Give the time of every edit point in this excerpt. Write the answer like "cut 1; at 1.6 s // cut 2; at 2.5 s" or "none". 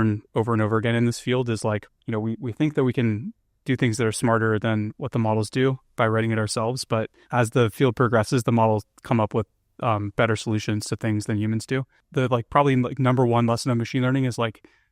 cut 1; at 1.9 s // cut 2; at 7.2 s // cut 3; at 12.0 s